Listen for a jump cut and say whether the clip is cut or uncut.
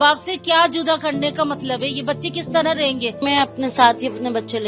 cut